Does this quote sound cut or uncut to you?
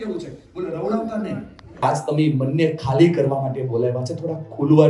cut